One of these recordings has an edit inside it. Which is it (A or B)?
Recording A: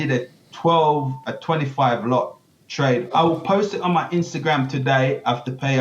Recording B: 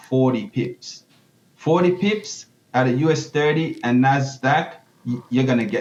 A